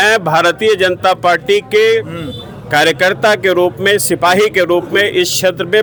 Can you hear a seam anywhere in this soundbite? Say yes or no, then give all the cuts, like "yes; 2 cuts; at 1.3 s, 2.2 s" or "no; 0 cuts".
no; 0 cuts